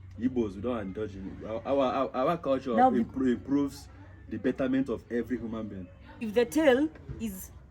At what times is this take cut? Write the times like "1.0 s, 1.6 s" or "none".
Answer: 6.2 s